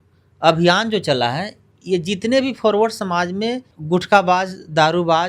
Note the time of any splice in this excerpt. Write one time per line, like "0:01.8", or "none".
0:03.7